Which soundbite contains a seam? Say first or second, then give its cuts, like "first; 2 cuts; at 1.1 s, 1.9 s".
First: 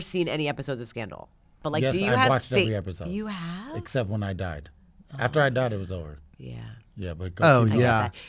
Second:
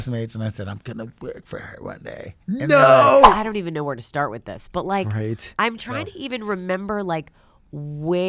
second; 1 cut; at 3.3 s